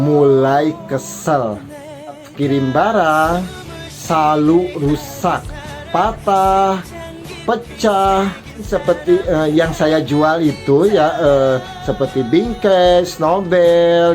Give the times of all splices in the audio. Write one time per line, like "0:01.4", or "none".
none